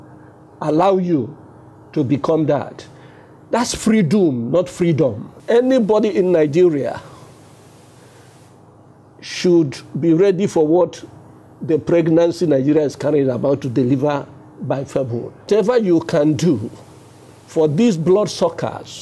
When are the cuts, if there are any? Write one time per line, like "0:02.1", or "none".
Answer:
0:05.3
0:15.5